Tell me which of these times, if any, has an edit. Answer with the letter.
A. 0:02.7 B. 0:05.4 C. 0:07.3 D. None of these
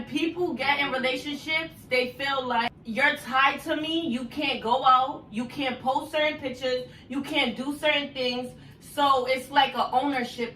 A